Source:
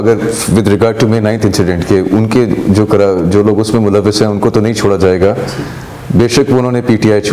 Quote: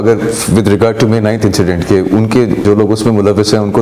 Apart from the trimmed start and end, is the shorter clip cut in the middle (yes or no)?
yes